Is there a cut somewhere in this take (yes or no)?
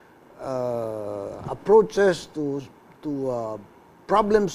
yes